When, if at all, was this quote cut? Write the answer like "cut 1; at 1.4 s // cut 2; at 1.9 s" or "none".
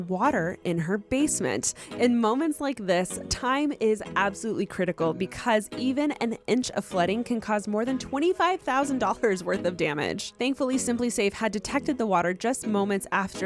none